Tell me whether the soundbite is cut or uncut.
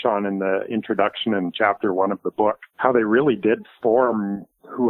cut